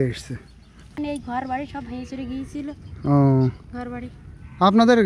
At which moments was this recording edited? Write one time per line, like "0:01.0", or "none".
0:01.0